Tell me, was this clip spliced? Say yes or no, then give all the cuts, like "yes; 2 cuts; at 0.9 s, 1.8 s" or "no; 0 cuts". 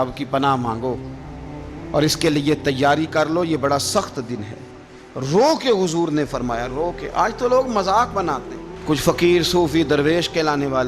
no; 0 cuts